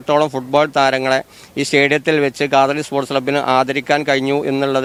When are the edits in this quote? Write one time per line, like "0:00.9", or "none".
none